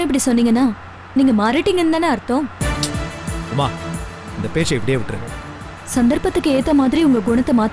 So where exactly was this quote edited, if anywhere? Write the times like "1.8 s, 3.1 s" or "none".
none